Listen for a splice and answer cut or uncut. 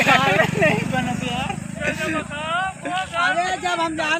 uncut